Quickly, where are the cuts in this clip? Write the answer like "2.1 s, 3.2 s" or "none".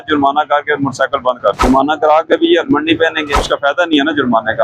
1.6 s, 3.4 s